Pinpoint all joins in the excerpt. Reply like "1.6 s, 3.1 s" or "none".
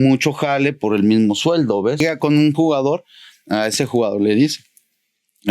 2.0 s

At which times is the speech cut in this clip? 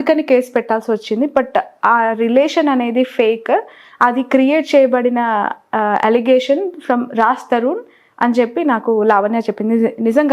none

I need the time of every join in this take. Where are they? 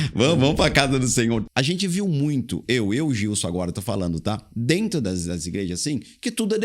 1.4 s

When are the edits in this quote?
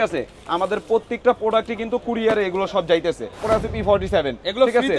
3.4 s

